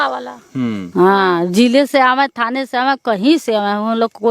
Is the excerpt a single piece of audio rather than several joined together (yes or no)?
yes